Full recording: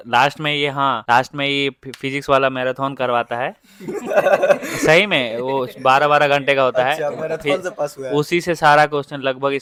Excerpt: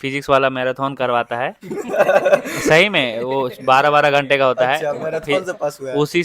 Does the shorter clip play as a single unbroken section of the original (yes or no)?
no